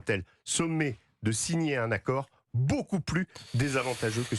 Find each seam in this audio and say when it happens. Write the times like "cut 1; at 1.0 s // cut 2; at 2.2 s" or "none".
none

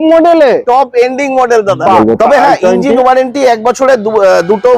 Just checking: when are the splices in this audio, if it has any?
cut 1; at 2.0 s

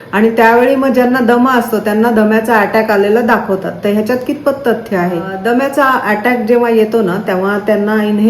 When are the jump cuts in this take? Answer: cut 1; at 5.3 s

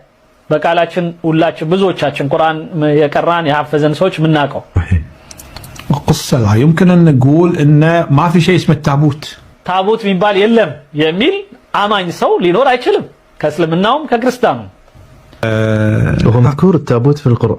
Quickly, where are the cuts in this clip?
cut 1; at 15.4 s

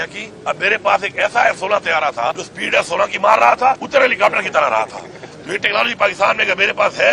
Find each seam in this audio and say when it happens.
cut 1; at 2.5 s // cut 2; at 3.8 s

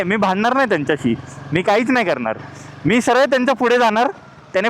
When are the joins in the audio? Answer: none

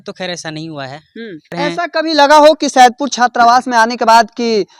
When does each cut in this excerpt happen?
cut 1; at 1.5 s

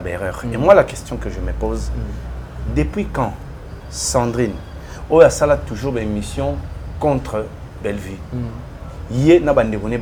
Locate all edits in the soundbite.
none

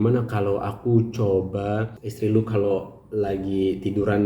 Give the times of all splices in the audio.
cut 1; at 2.0 s

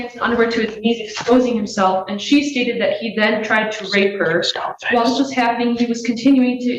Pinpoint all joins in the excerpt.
none

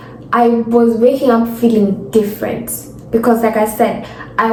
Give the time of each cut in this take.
none

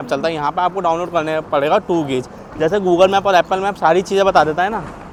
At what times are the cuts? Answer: none

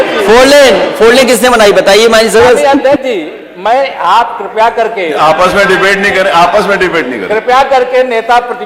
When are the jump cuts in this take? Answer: none

